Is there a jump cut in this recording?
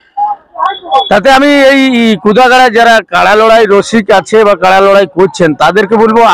no; 0 cuts

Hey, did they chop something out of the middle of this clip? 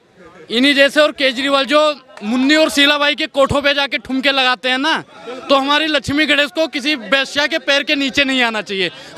no; 0 cuts

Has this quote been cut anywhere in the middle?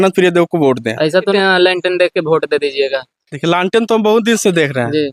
no; 0 cuts

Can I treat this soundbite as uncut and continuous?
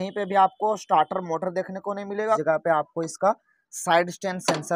no; 1 cut; at 2.4 s

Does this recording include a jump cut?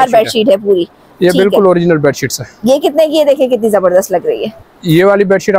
no; 0 cuts

